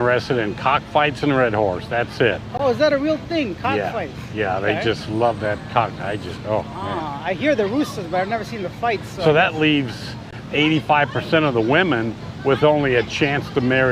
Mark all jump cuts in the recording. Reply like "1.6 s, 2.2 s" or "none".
none